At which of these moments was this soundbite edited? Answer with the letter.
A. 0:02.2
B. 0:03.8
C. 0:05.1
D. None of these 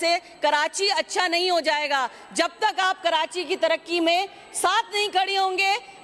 D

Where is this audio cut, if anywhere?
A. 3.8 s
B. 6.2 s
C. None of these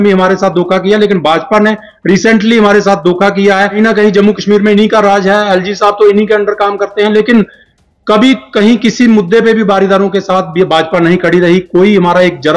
A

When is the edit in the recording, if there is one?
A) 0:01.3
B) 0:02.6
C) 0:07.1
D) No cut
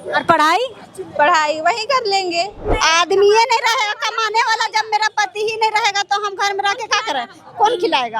B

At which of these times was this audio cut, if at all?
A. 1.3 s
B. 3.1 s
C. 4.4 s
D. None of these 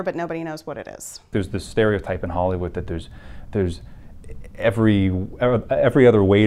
A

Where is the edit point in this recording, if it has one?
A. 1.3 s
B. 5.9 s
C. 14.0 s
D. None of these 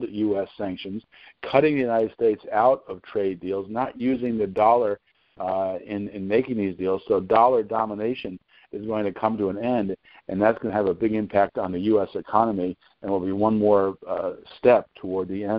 D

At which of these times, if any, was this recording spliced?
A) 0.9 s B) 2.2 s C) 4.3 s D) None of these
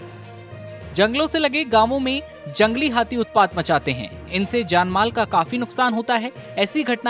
A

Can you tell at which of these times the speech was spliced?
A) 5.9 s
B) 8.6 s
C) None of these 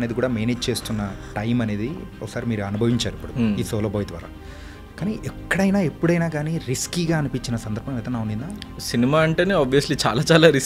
B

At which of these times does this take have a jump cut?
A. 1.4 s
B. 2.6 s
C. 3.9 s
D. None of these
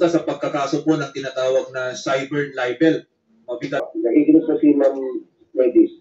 C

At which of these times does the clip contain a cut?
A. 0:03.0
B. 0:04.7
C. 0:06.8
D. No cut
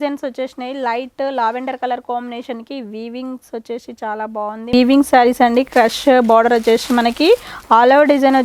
B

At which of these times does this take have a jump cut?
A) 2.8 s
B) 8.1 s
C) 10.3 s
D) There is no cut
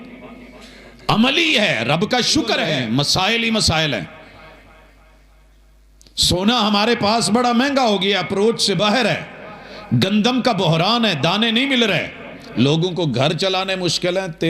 A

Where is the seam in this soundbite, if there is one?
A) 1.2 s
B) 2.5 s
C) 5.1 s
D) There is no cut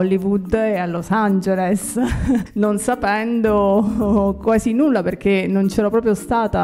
B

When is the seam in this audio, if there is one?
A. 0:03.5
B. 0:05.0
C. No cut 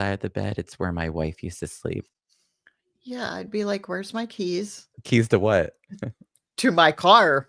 B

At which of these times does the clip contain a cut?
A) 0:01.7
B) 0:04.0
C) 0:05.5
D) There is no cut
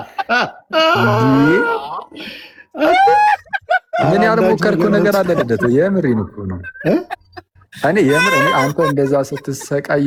D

